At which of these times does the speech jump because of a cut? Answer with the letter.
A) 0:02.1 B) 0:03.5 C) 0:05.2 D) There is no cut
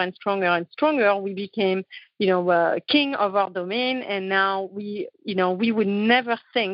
D